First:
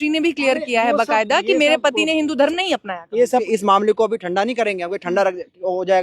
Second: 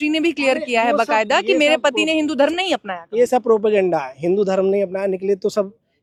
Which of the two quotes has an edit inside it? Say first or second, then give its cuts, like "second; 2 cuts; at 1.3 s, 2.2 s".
first; 1 cut; at 3.5 s